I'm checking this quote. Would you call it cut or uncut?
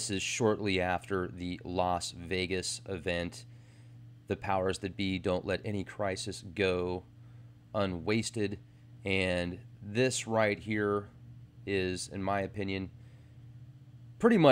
cut